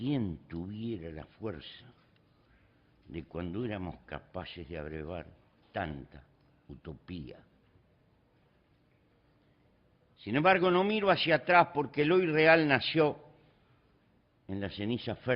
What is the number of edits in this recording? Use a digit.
0